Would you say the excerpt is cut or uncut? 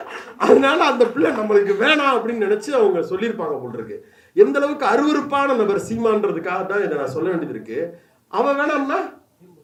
uncut